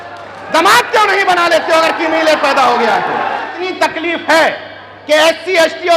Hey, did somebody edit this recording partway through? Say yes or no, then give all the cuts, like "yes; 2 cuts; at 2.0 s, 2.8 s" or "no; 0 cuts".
yes; 1 cut; at 3.6 s